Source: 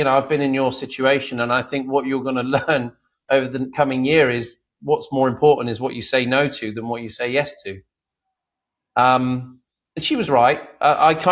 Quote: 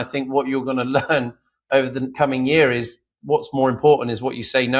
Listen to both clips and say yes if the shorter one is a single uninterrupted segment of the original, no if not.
yes